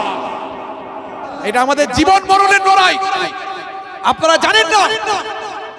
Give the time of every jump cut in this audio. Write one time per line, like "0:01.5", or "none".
0:01.3